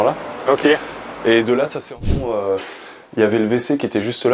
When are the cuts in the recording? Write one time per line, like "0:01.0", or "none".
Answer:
0:02.0